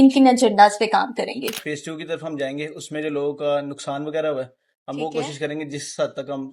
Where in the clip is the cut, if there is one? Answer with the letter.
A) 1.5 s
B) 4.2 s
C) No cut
A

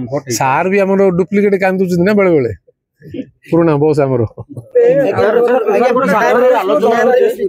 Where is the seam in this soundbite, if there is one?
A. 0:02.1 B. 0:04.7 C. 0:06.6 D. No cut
D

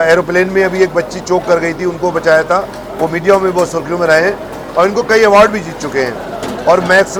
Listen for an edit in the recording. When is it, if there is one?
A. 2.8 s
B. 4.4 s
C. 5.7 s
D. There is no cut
D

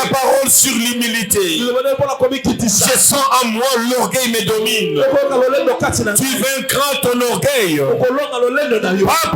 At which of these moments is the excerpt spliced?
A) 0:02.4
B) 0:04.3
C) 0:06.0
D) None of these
D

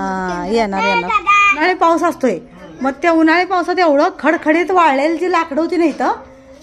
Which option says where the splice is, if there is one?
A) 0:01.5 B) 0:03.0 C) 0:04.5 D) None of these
A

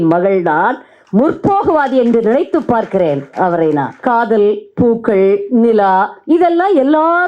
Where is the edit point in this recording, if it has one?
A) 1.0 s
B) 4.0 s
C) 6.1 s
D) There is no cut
B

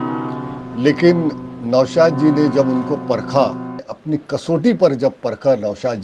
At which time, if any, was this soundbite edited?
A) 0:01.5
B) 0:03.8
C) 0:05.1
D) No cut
B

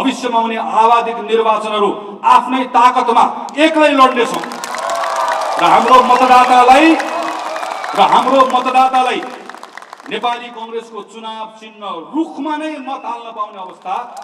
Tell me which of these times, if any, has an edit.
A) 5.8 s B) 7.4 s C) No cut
C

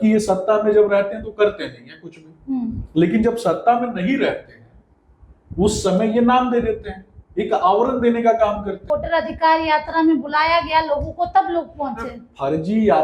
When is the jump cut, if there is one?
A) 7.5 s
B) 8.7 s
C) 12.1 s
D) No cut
B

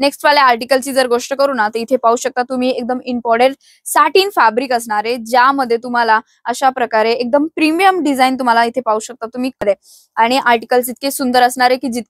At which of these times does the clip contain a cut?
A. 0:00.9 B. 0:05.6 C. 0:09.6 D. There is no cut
C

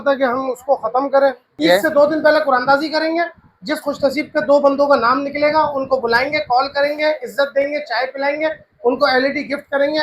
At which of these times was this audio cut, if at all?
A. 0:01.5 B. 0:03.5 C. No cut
A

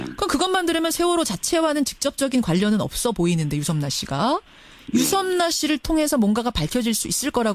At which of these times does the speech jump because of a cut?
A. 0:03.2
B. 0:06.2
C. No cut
B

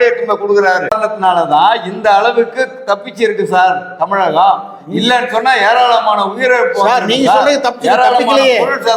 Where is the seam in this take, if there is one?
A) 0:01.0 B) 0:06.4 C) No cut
A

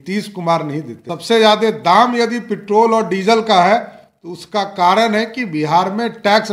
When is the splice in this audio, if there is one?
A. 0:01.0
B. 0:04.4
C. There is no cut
A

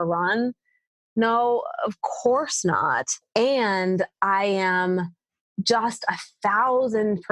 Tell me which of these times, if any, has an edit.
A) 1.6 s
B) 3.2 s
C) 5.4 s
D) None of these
B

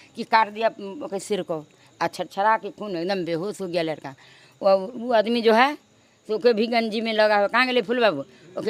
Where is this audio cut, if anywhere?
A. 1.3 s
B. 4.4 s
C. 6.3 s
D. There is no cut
D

